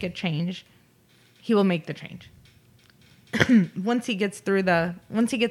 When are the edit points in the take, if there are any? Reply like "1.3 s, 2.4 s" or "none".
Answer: none